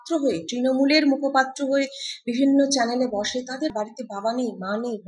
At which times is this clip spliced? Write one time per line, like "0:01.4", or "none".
0:03.7